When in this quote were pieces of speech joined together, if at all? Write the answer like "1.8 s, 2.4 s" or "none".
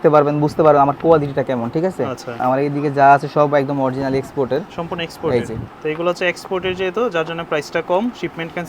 2.4 s, 5.6 s

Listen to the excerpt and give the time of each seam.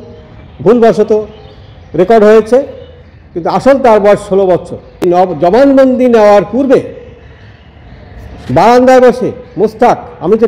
5.0 s

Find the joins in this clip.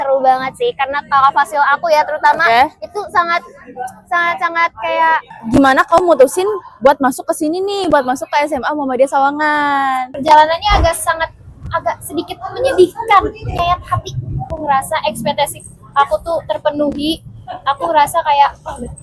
5.3 s, 10.1 s, 14.5 s

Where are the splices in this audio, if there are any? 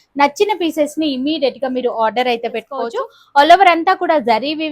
2.9 s

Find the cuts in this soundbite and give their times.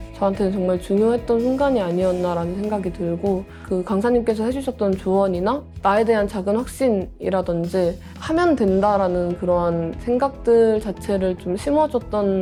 none

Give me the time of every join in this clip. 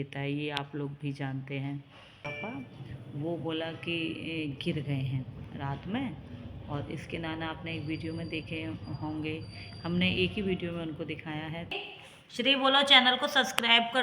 2.3 s, 11.8 s

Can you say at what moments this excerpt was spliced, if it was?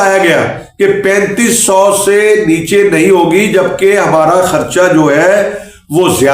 none

